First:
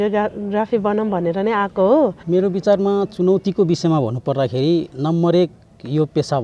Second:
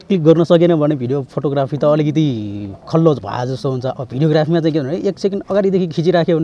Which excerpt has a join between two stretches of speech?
first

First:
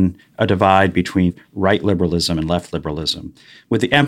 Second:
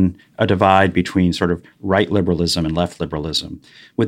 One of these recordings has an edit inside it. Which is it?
first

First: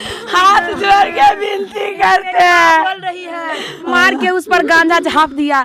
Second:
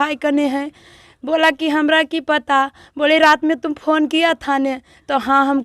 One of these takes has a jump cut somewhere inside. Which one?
first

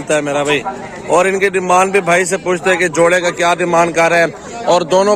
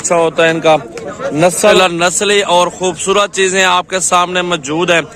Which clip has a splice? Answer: second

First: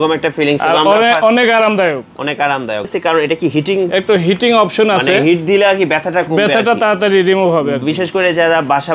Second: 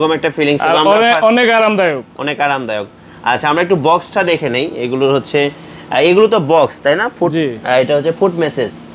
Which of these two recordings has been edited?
first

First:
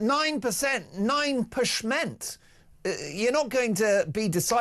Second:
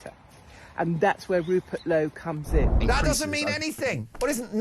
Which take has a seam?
second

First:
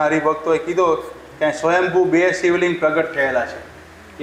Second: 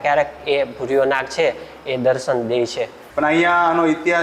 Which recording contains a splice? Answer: second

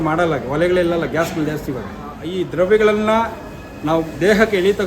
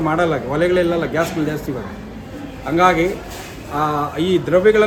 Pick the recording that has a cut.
first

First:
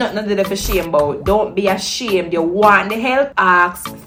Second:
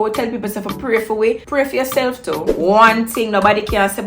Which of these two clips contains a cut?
second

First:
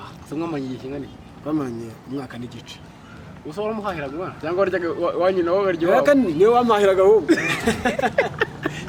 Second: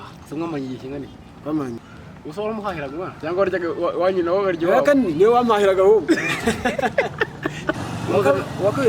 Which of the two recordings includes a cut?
second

